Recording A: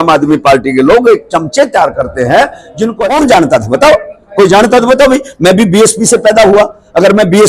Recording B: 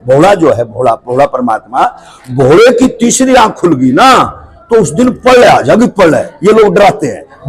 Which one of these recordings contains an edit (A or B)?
A